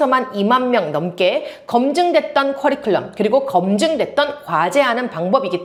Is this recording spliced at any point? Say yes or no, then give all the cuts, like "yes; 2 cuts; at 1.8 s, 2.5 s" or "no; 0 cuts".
no; 0 cuts